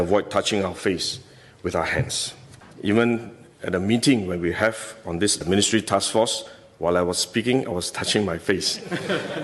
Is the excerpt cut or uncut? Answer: cut